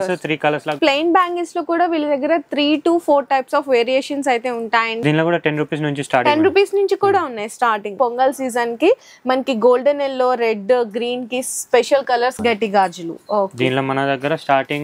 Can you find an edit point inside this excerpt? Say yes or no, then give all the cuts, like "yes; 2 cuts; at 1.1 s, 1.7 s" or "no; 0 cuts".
yes; 4 cuts; at 0.8 s, 5.0 s, 7.9 s, 12.4 s